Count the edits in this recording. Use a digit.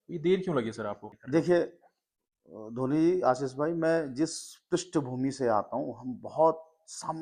0